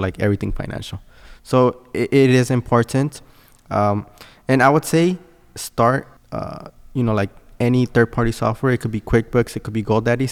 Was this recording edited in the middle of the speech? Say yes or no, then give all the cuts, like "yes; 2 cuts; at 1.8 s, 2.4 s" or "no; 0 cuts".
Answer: no; 0 cuts